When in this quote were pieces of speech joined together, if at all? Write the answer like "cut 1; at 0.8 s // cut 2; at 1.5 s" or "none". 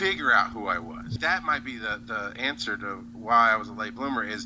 cut 1; at 1.2 s